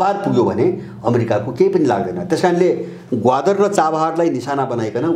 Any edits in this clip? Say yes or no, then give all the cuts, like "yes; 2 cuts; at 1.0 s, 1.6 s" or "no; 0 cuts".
no; 0 cuts